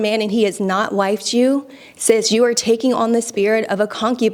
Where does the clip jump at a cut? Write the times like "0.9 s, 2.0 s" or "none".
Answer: none